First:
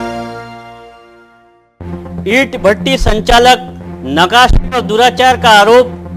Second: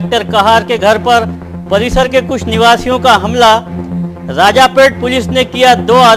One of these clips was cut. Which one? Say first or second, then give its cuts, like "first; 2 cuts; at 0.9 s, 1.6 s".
first; 1 cut; at 2.2 s